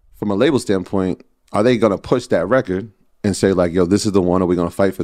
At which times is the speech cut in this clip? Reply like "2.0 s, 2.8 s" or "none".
none